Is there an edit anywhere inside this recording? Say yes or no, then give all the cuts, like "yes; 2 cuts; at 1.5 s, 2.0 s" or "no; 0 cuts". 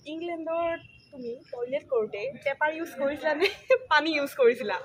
no; 0 cuts